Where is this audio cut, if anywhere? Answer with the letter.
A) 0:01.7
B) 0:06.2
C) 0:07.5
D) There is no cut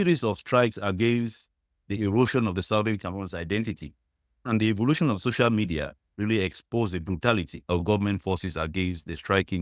C